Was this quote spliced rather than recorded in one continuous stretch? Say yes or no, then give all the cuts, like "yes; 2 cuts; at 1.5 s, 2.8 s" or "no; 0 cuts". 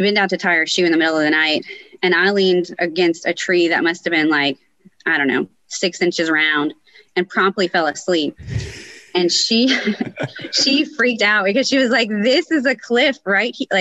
no; 0 cuts